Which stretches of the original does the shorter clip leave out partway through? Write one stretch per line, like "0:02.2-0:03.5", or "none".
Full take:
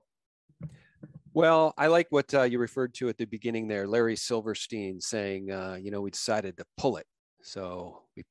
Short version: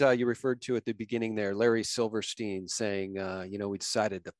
none